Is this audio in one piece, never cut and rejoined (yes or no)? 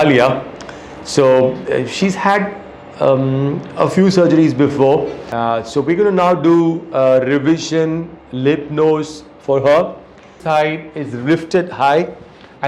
no